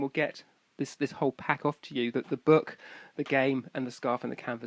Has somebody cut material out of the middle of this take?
no; 0 cuts

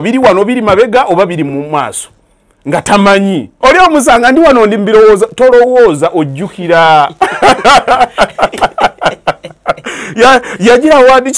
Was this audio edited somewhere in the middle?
yes; 1 cut; at 3.5 s

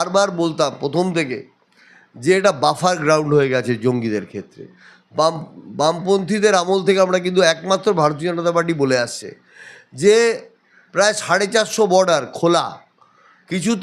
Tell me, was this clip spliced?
no; 0 cuts

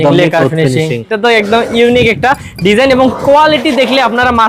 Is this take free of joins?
no; 1 cut; at 1.1 s

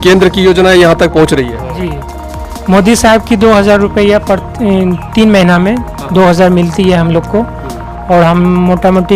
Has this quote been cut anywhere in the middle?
no; 0 cuts

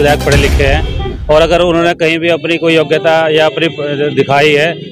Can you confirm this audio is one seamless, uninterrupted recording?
yes; 0 cuts

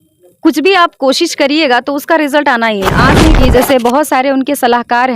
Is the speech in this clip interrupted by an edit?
yes; 1 cut; at 3.4 s

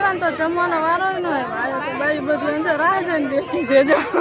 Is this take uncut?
yes; 0 cuts

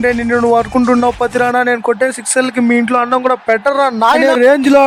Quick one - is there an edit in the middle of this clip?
no; 0 cuts

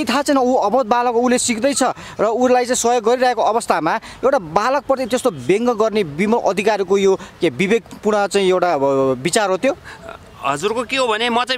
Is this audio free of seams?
yes; 0 cuts

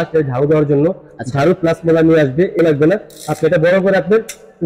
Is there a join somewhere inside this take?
yes; 1 cut; at 2.6 s

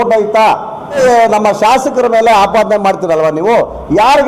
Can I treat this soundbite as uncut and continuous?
no; 1 cut; at 1.0 s

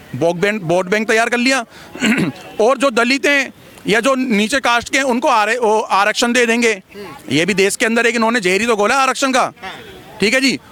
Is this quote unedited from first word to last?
yes; 0 cuts

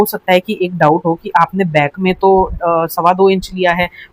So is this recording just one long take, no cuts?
yes; 0 cuts

